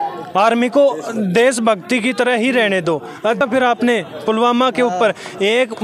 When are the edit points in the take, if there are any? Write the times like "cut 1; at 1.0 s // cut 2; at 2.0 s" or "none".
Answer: cut 1; at 3.4 s